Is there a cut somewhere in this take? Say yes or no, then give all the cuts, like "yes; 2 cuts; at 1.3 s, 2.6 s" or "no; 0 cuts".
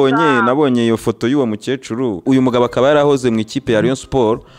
yes; 1 cut; at 2.2 s